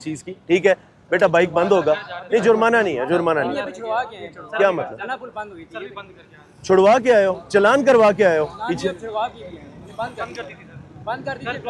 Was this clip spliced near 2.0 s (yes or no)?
no